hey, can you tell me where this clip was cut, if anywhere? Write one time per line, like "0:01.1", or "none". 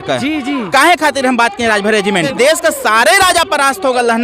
0:02.3